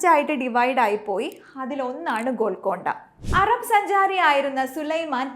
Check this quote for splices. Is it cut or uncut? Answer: cut